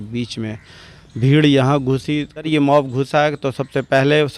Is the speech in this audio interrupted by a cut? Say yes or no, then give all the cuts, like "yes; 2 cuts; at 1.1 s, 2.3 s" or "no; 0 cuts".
yes; 1 cut; at 2.5 s